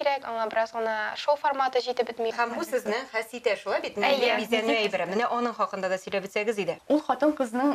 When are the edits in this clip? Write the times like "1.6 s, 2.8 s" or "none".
2.3 s, 6.8 s